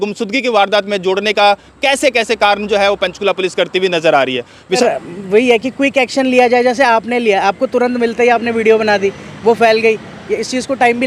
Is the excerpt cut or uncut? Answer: cut